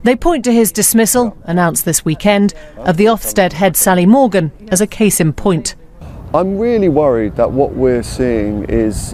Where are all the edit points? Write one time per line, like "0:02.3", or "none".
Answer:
none

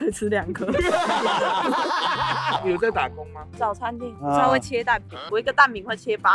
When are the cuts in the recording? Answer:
0:02.6
0:05.2

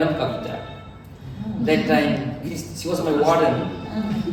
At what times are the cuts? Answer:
none

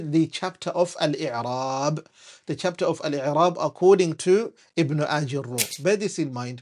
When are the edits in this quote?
0:05.7

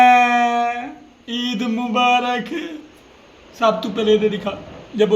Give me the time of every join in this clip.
0:03.5

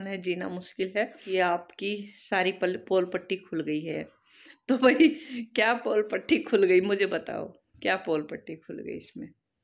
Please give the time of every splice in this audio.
0:01.2

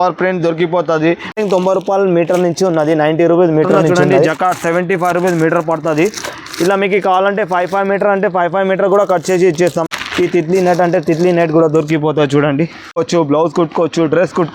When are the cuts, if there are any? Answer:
0:01.4
0:04.1
0:09.9
0:13.0

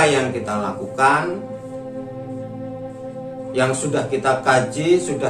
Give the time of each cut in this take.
0:01.4
0:03.5

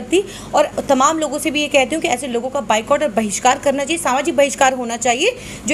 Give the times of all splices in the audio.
none

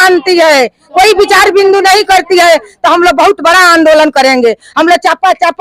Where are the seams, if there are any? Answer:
none

